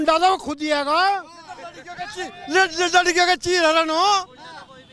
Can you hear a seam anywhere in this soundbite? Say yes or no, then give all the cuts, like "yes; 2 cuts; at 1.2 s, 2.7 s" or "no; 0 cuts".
no; 0 cuts